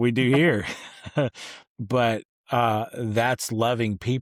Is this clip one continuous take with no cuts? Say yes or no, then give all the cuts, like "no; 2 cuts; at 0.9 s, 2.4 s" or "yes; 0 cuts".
yes; 0 cuts